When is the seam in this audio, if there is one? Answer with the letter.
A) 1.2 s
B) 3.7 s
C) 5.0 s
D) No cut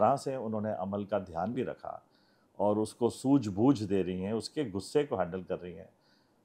D